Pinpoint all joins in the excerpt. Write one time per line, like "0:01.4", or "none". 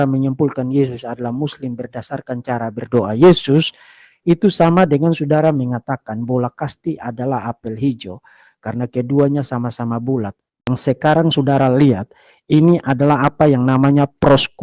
0:10.7